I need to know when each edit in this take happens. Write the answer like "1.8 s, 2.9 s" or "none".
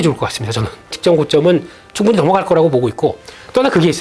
1.0 s